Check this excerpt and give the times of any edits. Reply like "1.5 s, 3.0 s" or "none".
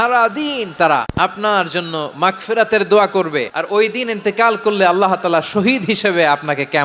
1.1 s, 3.6 s